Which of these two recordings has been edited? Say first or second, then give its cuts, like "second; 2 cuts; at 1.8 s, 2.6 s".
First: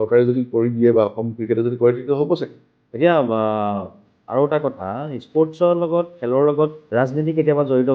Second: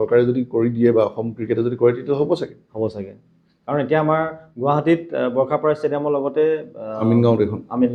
first; 2 cuts; at 2.6 s, 6.8 s